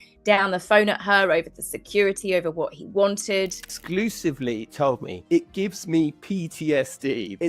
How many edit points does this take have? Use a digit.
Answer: 1